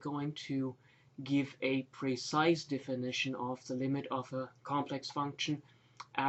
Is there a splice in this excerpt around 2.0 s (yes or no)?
no